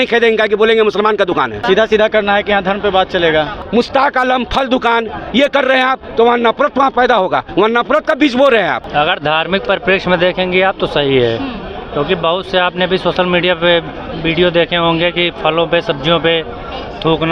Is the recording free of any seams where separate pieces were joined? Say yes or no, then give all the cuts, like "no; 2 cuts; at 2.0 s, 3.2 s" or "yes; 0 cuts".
no; 3 cuts; at 1.6 s, 3.6 s, 8.8 s